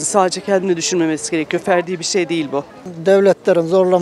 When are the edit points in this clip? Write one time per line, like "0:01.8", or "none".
0:02.9